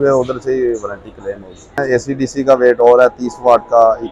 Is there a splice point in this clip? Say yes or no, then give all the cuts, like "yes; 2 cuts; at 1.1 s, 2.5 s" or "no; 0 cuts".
yes; 1 cut; at 1.8 s